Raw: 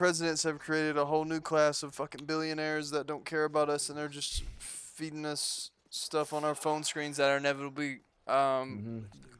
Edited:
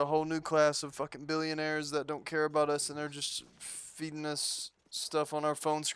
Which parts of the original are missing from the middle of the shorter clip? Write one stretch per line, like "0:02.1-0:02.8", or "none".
none

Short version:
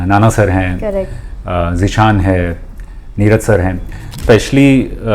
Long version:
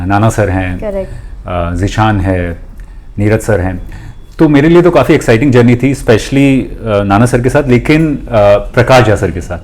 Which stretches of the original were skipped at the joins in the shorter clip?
0:04.2-0:06.0

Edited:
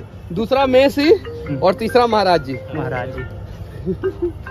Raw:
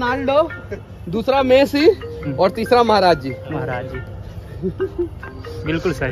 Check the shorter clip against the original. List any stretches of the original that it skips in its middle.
none

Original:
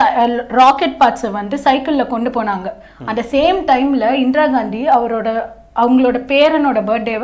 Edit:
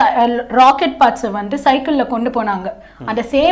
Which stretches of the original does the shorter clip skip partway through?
none

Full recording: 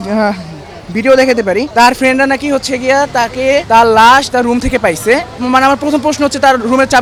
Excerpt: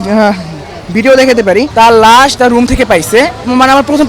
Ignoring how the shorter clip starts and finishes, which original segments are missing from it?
0:01.7-0:03.6

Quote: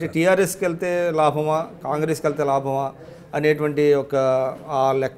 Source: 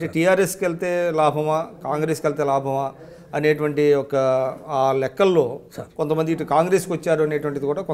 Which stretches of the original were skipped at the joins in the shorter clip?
none

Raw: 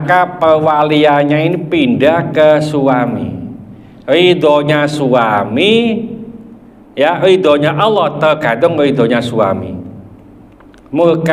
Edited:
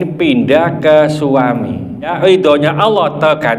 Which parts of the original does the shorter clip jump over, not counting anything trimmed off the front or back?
0:03.7-0:07.1

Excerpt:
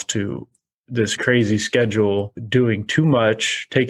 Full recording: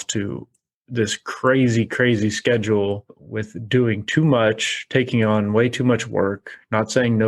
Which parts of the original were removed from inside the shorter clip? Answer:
0:01.2-0:01.9
0:03.1-0:03.6

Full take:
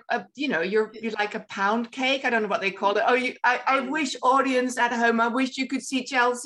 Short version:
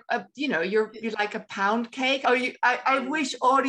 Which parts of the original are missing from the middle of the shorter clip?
0:02.2-0:03.0

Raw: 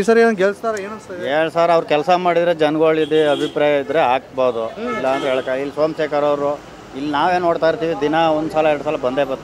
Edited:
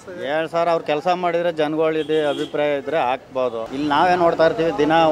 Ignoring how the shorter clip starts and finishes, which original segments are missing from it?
0:04.7-0:06.9

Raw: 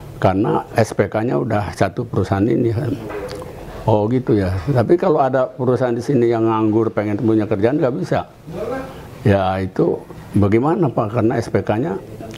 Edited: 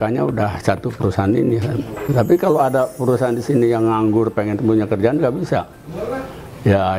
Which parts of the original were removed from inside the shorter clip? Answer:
0:03.1-0:04.6

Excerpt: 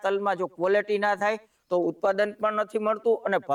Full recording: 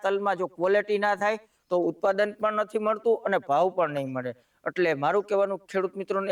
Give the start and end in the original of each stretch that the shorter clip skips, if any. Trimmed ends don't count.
none

